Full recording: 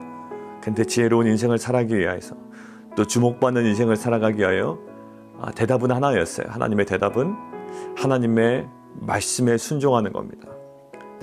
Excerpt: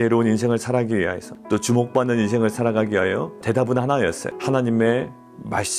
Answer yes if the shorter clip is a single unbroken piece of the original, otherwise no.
no